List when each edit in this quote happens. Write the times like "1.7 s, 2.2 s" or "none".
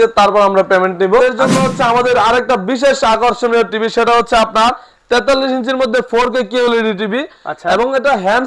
1.4 s